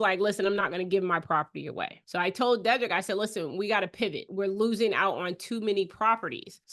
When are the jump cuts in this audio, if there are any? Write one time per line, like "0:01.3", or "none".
0:04.2